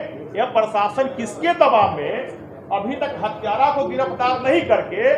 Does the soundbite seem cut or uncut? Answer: uncut